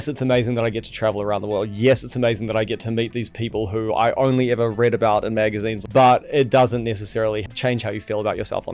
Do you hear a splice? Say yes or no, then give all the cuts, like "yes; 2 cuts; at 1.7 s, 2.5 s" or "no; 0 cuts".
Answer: yes; 1 cut; at 5.8 s